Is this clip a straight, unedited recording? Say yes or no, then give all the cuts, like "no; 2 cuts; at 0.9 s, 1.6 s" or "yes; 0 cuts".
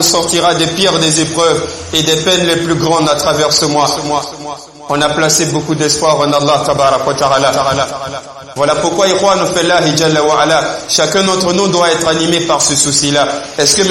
no; 1 cut; at 8.4 s